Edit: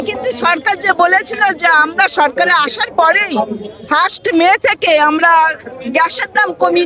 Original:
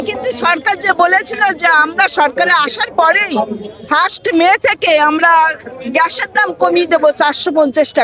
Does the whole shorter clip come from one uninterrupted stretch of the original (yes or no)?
yes